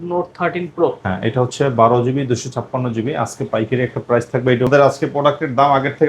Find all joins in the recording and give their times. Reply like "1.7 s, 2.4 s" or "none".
4.7 s